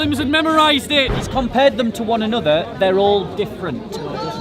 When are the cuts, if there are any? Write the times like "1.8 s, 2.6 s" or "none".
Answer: 1.2 s